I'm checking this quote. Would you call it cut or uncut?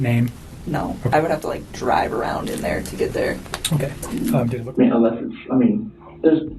cut